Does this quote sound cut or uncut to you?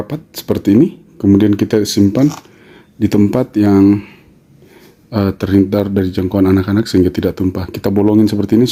uncut